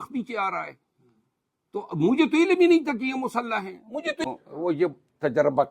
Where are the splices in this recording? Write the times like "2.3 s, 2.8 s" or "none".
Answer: 4.2 s